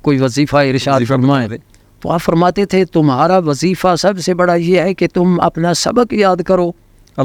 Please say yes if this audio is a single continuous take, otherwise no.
yes